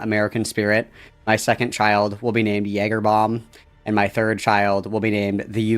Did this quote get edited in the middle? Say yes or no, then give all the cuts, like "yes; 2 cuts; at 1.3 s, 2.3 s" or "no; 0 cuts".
no; 0 cuts